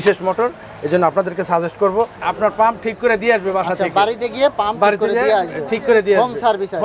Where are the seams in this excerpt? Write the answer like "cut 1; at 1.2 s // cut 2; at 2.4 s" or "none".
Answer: cut 1; at 2.2 s